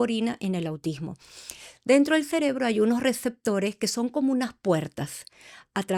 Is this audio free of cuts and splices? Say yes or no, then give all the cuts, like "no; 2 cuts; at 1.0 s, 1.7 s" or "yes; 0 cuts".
yes; 0 cuts